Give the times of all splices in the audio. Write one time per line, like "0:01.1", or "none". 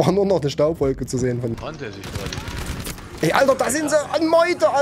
0:01.6